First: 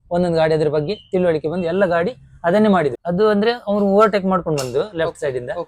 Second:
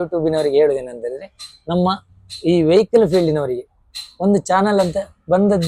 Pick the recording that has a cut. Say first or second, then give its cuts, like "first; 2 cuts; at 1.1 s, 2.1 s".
first; 1 cut; at 3.0 s